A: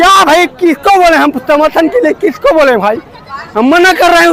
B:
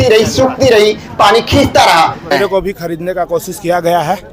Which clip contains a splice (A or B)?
B